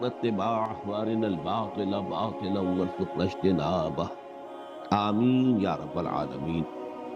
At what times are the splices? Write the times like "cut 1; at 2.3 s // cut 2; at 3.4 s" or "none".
none